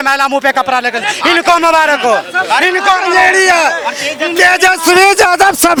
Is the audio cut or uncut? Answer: uncut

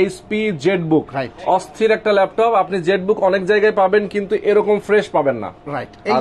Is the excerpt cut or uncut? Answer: uncut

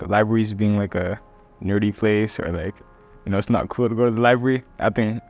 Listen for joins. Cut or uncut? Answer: uncut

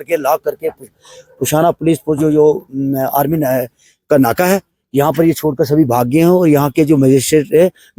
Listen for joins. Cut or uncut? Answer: uncut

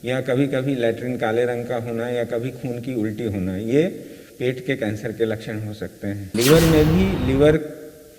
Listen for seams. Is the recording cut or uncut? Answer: cut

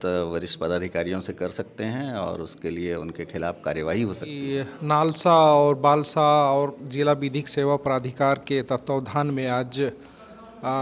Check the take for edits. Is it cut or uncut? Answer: cut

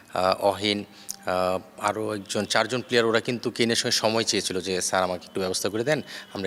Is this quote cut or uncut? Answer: uncut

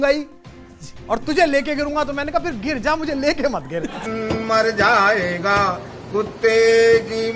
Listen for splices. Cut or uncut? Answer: cut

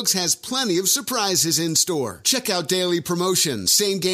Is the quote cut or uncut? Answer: uncut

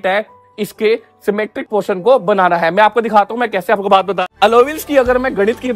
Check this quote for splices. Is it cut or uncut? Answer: cut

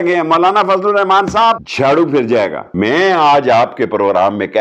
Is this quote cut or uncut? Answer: cut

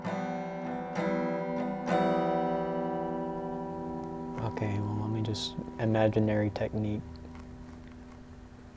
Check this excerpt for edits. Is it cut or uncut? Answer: uncut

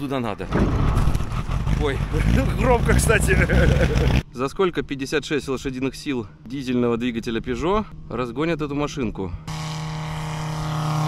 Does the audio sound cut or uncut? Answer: cut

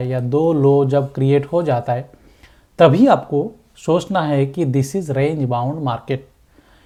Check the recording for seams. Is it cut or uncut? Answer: uncut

